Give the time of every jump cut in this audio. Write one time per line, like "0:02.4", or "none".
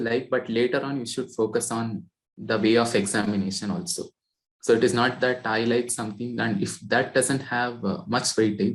none

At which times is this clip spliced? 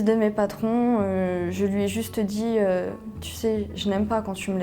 none

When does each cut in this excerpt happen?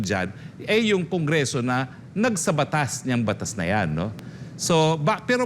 none

